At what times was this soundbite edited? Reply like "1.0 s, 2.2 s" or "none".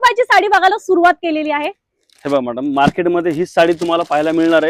none